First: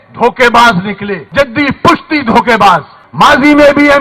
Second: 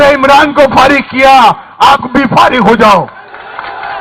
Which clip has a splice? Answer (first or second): first